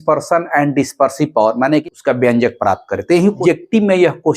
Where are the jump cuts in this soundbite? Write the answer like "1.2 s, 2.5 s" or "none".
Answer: 1.8 s, 3.4 s